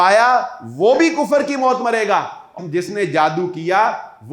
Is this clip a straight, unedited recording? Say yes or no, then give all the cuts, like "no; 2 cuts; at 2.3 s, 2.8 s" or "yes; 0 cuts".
no; 1 cut; at 2.5 s